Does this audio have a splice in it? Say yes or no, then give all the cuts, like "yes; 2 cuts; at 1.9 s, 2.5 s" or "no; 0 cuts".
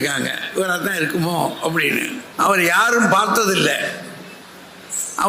yes; 1 cut; at 2.2 s